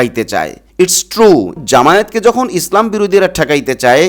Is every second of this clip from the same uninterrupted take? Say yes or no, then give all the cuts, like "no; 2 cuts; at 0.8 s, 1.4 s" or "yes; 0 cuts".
no; 1 cut; at 1.6 s